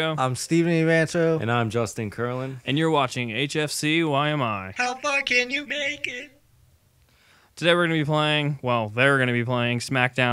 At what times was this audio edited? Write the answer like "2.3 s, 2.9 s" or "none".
1.9 s